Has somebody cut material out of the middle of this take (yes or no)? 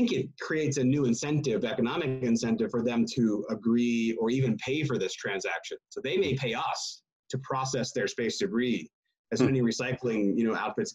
no